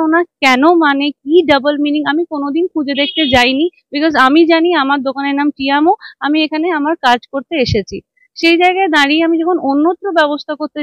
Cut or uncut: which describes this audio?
uncut